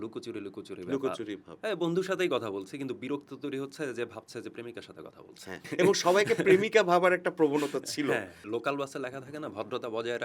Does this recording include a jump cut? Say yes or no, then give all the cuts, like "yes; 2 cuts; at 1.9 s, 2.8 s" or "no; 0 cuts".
yes; 2 cuts; at 5.7 s, 8.4 s